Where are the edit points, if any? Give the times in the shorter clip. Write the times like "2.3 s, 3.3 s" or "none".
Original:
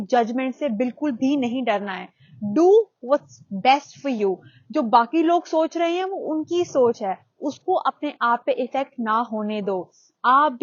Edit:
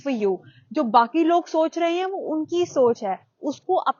none